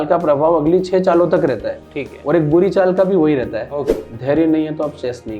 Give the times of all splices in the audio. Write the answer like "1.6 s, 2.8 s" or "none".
3.9 s